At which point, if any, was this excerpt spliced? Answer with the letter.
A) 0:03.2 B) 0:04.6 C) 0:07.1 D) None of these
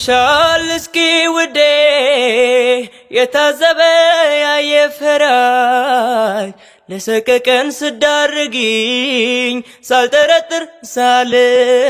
D